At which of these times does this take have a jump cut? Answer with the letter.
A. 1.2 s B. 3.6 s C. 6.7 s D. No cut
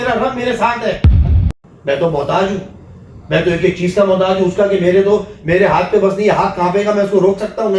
A